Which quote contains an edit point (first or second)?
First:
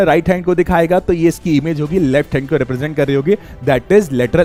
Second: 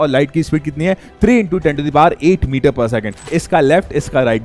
second